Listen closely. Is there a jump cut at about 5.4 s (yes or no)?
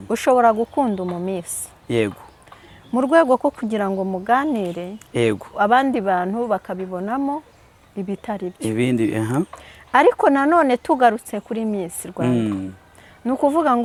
no